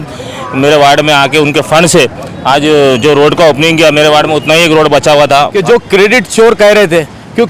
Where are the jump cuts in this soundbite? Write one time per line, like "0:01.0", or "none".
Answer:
0:05.5